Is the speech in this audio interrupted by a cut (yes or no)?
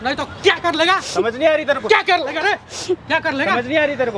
no